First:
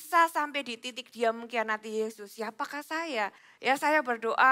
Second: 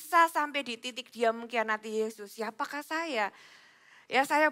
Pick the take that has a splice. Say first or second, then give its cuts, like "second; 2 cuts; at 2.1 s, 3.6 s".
first; 1 cut; at 3.5 s